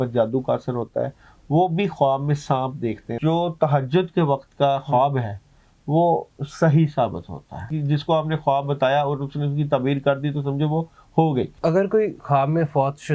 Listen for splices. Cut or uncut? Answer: cut